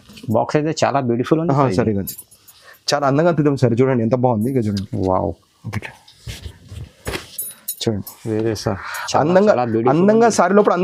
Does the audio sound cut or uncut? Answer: uncut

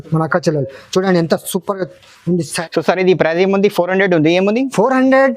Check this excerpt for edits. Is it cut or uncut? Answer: cut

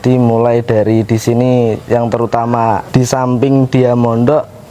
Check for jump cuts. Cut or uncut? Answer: cut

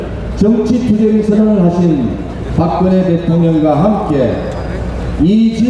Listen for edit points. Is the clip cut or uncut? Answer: uncut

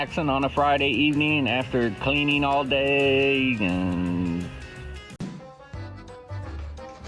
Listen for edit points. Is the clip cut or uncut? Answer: cut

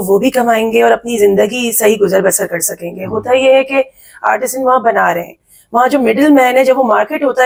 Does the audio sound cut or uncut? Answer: uncut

